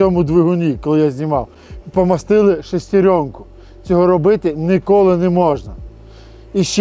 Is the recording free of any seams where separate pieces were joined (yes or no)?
yes